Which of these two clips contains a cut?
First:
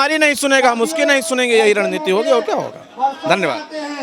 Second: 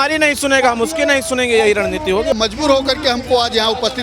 second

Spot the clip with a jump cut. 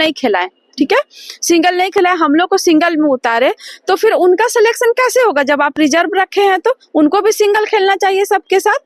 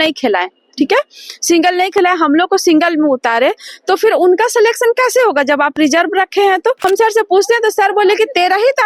second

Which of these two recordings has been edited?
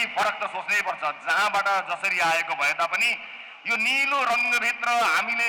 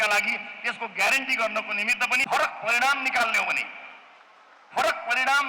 second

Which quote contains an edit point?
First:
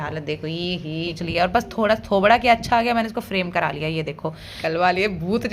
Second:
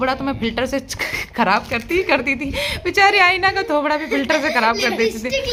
first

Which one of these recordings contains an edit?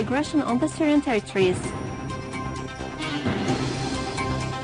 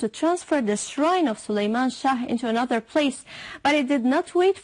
second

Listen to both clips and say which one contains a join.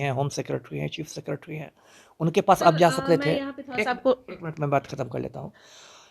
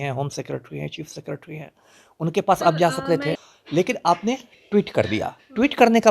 second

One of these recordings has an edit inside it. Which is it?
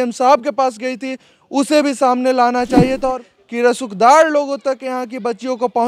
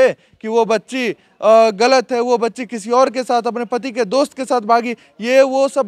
first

